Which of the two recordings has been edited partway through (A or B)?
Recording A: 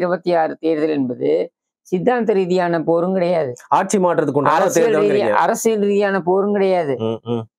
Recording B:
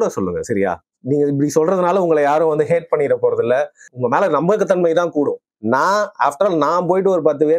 B